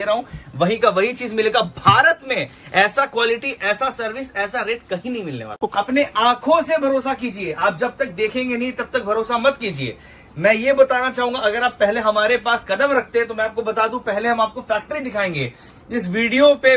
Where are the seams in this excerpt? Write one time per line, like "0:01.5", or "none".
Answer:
0:05.6